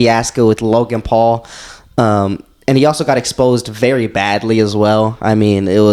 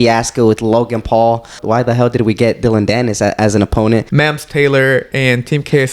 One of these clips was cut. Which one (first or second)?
second